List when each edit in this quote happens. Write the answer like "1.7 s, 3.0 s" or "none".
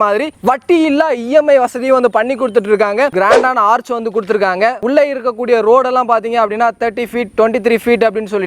3.1 s, 4.8 s